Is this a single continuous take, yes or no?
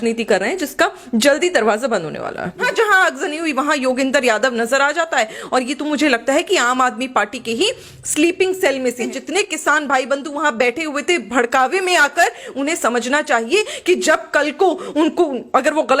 no